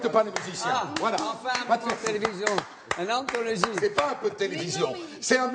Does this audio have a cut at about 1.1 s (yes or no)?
yes